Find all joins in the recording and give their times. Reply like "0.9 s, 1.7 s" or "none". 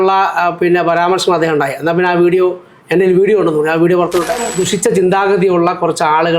4.5 s